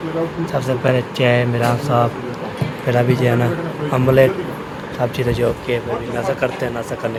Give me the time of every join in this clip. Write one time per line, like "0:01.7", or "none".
none